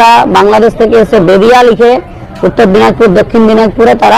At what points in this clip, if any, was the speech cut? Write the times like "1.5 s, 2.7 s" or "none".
none